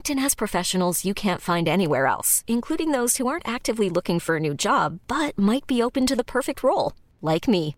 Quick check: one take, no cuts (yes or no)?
yes